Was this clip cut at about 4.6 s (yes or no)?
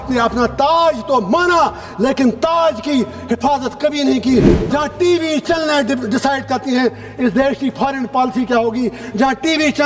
yes